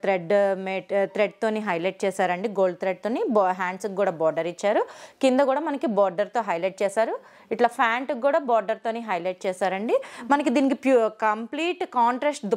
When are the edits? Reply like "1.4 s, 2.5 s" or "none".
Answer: none